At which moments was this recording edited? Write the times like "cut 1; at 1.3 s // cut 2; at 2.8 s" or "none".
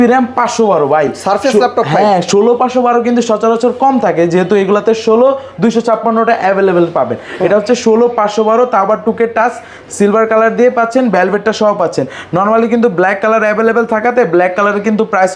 none